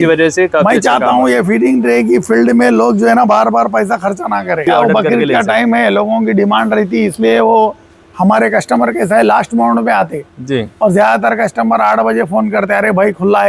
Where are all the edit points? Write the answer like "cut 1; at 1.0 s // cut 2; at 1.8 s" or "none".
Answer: cut 1; at 4.7 s